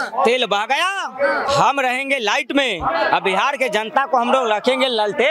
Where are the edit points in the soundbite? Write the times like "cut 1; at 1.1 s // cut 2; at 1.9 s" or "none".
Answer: cut 1; at 1.4 s